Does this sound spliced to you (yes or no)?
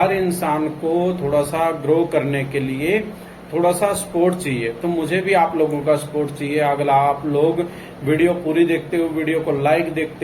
no